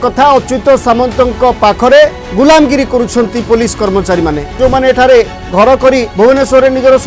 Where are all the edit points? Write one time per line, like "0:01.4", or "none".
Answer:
0:02.2
0:04.6
0:06.1